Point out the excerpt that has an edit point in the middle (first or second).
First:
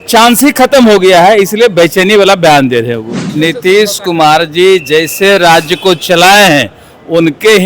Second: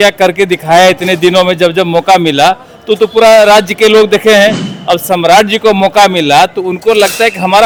first